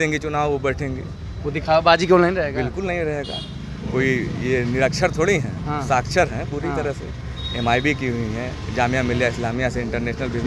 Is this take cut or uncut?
uncut